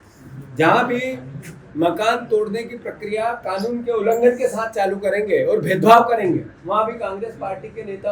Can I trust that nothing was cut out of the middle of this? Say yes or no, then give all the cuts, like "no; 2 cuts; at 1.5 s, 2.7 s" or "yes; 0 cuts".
yes; 0 cuts